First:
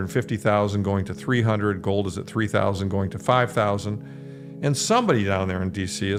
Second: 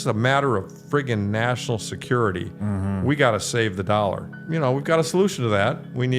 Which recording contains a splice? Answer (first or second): second